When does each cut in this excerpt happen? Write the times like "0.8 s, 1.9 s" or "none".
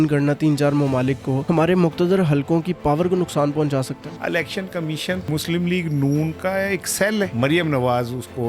1.3 s, 4.0 s, 5.3 s, 7.3 s

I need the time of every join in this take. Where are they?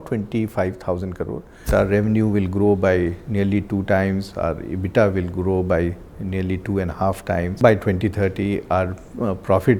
1.7 s, 7.6 s

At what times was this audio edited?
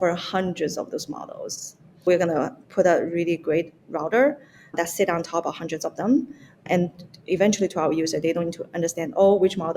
2.1 s, 4.7 s, 6.6 s

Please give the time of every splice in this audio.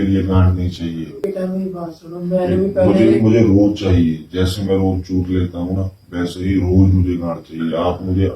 1.2 s

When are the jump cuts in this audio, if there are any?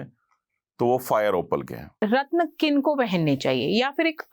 1.9 s

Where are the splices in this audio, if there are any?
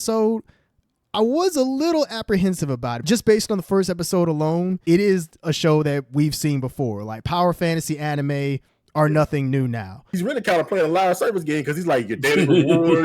3.0 s, 4.8 s, 10.1 s

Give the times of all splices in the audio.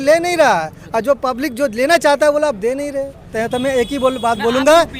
3.3 s

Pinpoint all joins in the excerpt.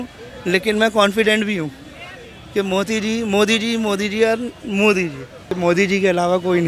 5.5 s

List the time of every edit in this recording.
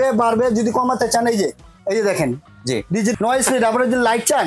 3.1 s

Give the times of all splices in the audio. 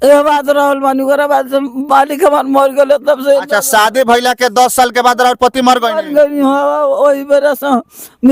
none

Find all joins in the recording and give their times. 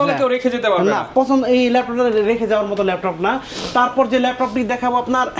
none

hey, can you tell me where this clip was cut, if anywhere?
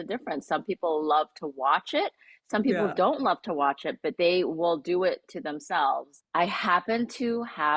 6.2 s

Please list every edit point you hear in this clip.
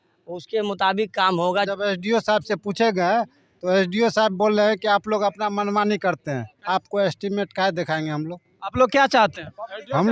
1.7 s, 6.5 s

